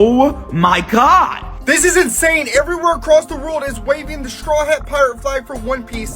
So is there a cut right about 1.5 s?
yes; 1 cut; at 1.5 s

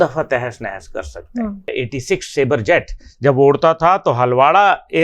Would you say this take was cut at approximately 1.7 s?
yes; 1 cut; at 1.7 s

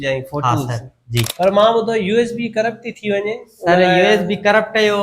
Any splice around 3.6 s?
no; 1 cut; at 1.3 s

